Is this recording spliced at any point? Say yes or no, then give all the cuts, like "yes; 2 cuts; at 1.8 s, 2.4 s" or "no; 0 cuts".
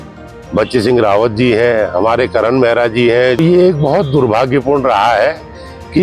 yes; 1 cut; at 3.4 s